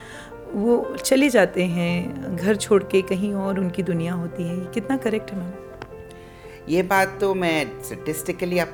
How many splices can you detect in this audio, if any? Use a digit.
0